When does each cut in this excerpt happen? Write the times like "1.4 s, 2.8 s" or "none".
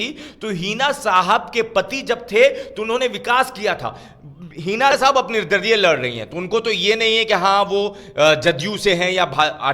4.9 s